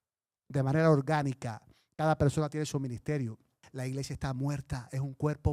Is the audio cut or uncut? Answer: cut